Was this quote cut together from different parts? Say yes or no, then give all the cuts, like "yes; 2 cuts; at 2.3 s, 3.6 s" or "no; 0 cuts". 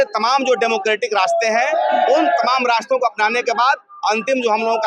no; 0 cuts